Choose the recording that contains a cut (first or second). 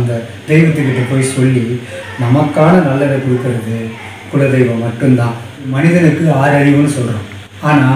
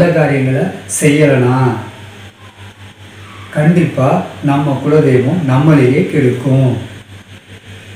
first